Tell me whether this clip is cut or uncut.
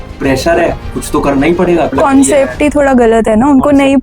cut